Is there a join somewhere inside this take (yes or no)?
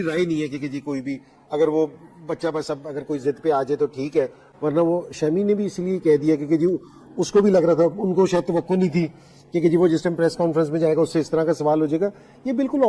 no